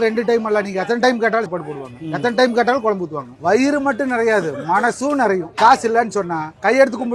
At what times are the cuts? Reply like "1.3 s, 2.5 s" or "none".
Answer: 1.5 s, 3.3 s, 5.5 s